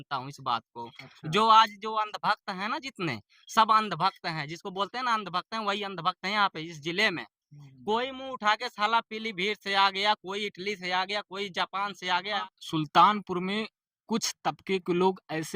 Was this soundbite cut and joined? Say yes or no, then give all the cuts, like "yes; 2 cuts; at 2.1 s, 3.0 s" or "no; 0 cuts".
yes; 1 cut; at 12.4 s